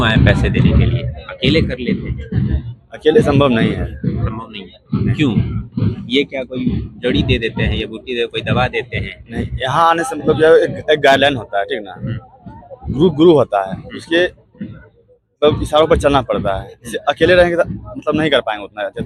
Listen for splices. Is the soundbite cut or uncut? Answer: uncut